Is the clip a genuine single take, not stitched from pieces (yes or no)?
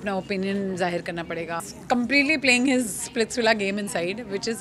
no